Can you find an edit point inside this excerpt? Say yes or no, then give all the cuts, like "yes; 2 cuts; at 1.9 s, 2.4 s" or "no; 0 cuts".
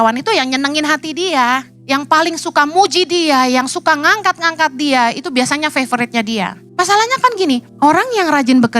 yes; 3 cuts; at 1.7 s, 6.6 s, 7.7 s